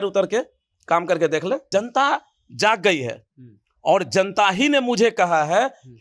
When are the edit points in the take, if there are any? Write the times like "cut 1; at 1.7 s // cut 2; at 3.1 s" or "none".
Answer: cut 1; at 1.6 s